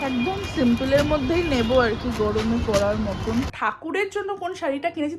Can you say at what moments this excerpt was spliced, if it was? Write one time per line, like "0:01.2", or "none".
0:03.5